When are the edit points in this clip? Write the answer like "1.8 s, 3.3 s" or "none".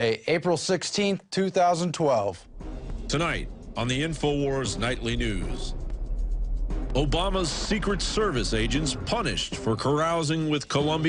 7.1 s